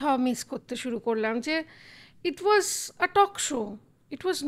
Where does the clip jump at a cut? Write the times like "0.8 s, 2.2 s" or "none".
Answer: none